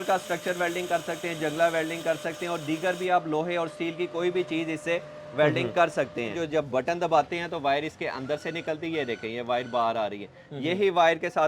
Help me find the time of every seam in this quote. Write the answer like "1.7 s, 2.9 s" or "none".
6.4 s

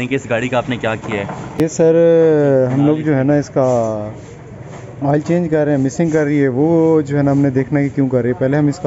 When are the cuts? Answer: none

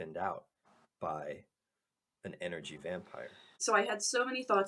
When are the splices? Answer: 3.6 s

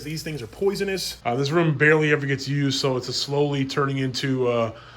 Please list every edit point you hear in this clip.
1.1 s

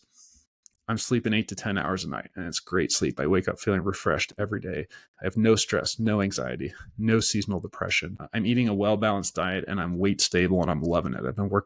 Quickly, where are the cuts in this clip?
8.2 s

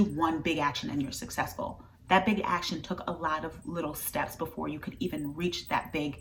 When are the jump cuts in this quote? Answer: none

